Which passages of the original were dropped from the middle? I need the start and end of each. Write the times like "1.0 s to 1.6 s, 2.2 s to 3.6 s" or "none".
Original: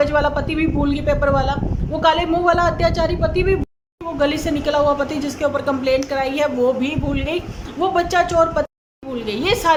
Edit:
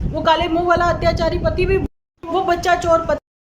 3.9 s to 7.6 s